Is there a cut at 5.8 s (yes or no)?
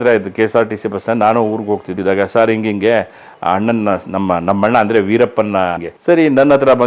yes